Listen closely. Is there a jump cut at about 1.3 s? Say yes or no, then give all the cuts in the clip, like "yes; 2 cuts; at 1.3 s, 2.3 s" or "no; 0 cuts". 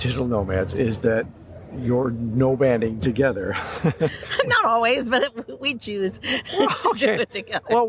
no; 0 cuts